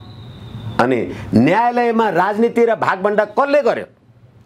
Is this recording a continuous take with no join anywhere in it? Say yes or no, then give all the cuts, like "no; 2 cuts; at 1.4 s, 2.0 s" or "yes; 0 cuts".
yes; 0 cuts